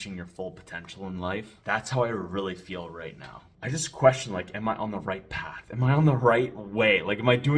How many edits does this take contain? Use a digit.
1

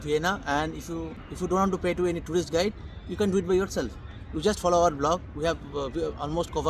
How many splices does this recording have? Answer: 1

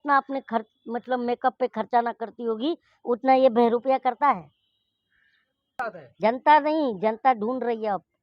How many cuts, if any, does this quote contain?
1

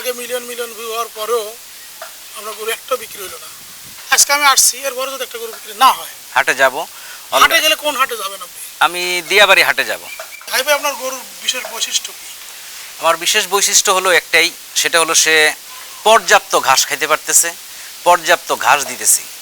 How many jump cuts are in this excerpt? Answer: 2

